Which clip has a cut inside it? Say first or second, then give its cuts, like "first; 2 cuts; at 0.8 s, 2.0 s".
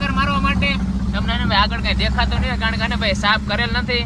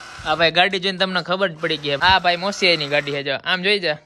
second; 1 cut; at 2.0 s